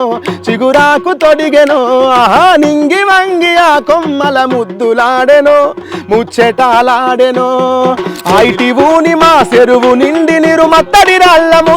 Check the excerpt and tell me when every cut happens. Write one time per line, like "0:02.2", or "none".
0:08.1